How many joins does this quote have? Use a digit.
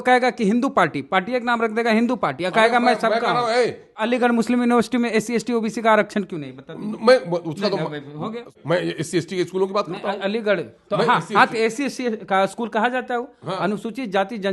2